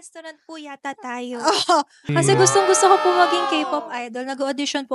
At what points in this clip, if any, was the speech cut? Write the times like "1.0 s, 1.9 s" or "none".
2.0 s